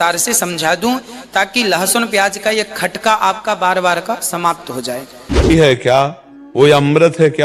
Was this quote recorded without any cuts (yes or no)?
no